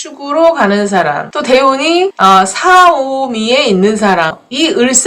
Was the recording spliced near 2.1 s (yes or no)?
yes